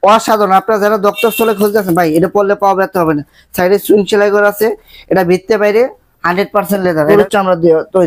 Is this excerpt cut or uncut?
cut